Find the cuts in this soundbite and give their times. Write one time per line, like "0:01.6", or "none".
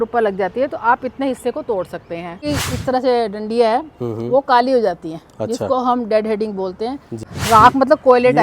0:02.4
0:07.3